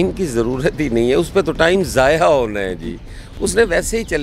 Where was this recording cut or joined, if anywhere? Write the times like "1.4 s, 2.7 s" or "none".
none